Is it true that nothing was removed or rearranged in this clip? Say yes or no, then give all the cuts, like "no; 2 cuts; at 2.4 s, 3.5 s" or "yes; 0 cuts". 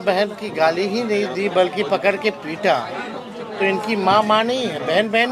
yes; 0 cuts